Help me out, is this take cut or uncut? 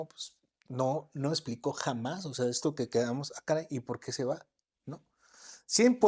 uncut